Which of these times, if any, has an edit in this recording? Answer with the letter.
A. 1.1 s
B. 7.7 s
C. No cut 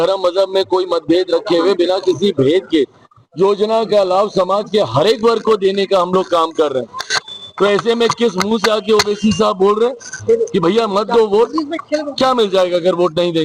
C